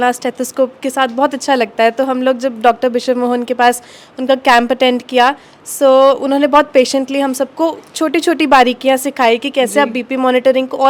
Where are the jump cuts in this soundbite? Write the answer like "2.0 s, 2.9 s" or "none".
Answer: none